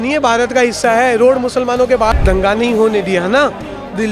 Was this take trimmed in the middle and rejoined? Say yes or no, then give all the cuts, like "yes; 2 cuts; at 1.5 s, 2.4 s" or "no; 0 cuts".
yes; 1 cut; at 2.2 s